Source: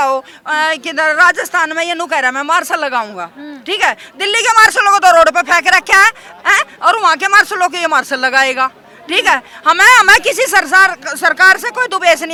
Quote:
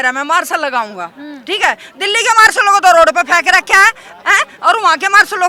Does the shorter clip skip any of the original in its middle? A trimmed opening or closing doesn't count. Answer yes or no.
no